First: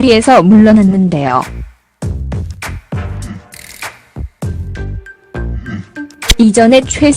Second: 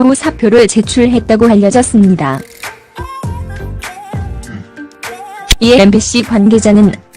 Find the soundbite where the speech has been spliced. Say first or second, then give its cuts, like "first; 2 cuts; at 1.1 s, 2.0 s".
second; 1 cut; at 2.5 s